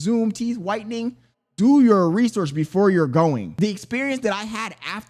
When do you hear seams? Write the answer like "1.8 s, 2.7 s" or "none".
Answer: 3.5 s